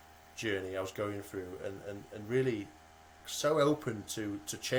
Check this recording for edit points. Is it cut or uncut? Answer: uncut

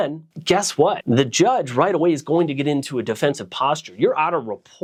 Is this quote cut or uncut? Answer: uncut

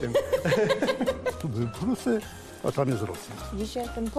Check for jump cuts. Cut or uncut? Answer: cut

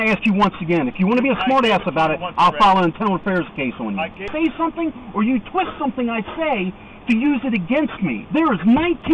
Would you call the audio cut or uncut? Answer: cut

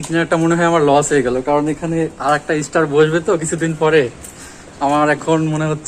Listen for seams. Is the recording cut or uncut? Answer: uncut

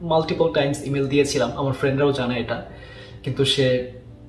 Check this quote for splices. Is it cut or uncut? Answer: uncut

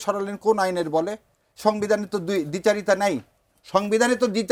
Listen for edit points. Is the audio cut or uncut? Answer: uncut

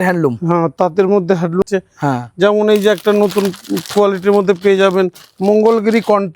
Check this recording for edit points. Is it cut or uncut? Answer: cut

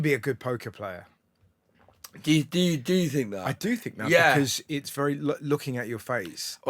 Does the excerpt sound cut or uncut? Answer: uncut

